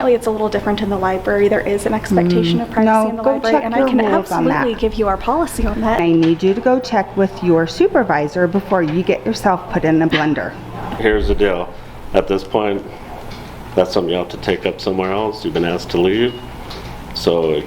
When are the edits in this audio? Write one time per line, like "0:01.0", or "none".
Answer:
0:06.0
0:10.9